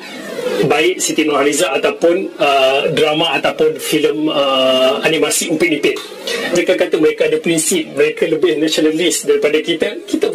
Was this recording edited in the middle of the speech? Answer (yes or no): yes